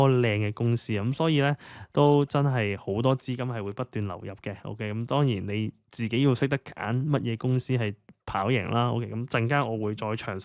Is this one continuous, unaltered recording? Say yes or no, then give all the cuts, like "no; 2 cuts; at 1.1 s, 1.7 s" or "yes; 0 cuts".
yes; 0 cuts